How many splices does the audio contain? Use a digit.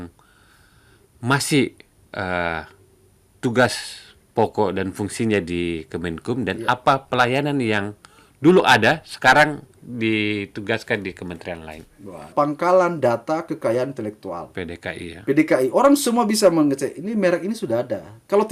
1